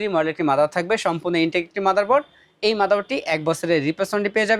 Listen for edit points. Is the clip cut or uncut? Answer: uncut